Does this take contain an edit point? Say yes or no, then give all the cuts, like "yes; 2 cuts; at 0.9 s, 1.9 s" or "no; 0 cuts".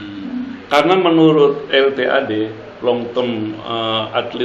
no; 0 cuts